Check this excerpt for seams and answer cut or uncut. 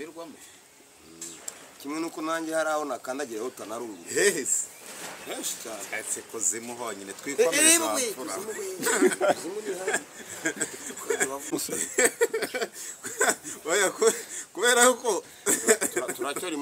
cut